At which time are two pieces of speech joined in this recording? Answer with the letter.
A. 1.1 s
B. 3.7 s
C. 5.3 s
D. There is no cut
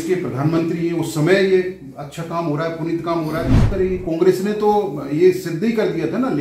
B